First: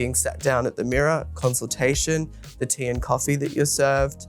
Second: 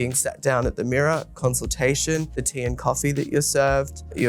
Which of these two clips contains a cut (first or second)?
second